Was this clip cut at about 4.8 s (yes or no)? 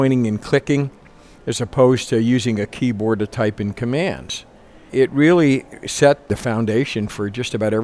yes